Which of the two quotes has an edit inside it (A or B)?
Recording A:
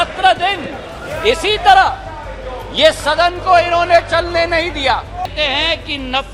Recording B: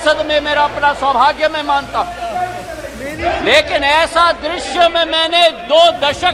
A